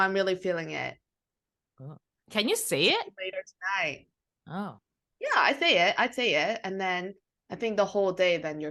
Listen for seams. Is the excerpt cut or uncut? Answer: uncut